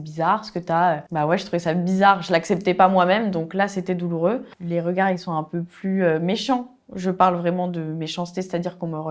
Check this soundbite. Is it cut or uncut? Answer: cut